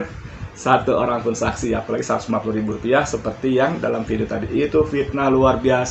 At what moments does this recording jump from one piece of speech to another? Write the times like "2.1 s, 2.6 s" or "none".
none